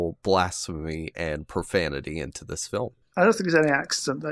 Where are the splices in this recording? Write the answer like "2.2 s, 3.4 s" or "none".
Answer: 3.0 s